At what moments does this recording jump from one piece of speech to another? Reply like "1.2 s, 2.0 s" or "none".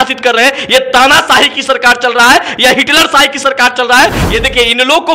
4.2 s